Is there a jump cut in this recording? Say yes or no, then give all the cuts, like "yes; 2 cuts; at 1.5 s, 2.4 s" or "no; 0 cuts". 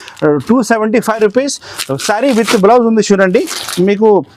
no; 0 cuts